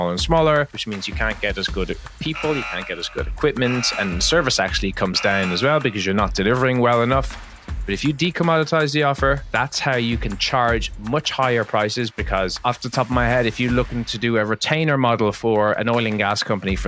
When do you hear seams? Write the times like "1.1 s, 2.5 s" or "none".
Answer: 7.8 s